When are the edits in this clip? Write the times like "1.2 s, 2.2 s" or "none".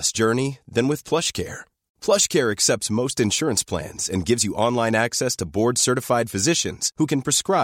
none

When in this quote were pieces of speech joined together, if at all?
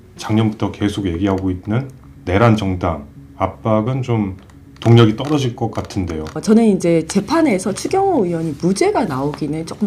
6.4 s

